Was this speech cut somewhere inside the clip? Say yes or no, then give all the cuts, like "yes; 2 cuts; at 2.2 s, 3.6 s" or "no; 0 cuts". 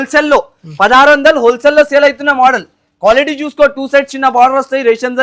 no; 0 cuts